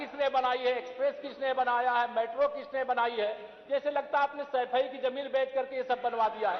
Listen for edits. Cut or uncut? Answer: uncut